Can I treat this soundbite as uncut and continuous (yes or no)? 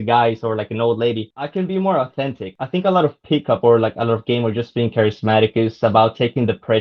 no